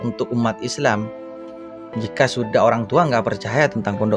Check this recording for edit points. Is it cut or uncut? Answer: uncut